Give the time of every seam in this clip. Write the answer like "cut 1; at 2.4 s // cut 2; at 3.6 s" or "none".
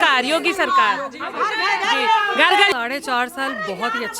cut 1; at 2.7 s